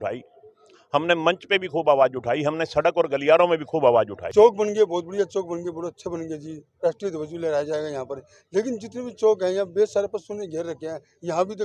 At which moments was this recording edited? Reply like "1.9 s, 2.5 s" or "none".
4.2 s